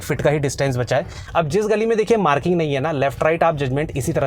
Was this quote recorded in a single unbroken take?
no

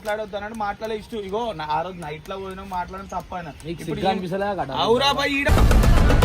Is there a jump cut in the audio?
no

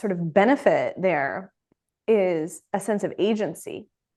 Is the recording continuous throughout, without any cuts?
yes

